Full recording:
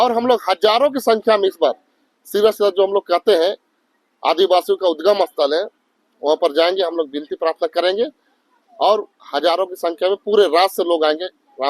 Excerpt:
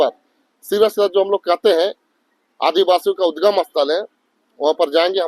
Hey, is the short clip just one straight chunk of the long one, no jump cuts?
yes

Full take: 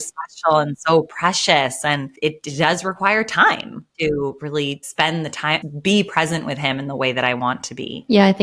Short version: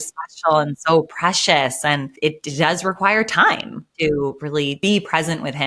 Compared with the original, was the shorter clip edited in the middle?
yes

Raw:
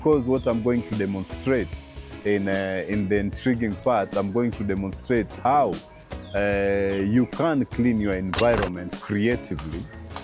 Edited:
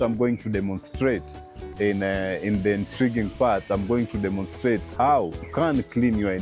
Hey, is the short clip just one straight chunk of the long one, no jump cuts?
no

